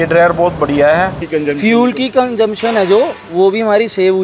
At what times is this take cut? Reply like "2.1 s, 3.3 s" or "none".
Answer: 1.2 s